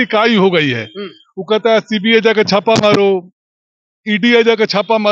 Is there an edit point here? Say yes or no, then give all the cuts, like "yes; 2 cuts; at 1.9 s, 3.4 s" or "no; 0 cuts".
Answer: no; 0 cuts